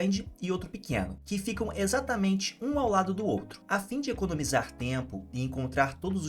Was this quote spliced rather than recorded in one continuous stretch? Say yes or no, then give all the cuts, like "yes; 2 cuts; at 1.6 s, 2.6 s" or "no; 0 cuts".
yes; 2 cuts; at 1.2 s, 3.6 s